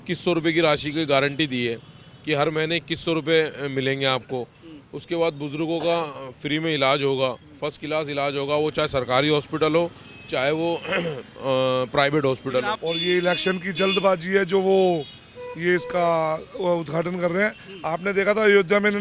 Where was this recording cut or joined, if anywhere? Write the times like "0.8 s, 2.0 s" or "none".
12.7 s